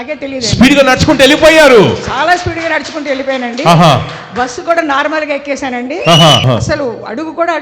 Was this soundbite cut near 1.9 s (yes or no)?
no